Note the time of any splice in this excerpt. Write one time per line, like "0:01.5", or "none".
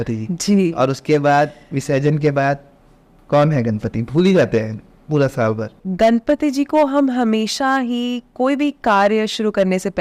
0:05.8